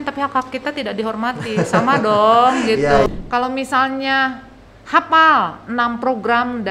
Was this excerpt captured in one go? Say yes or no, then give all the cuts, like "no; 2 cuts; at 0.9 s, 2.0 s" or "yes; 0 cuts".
no; 1 cut; at 3.1 s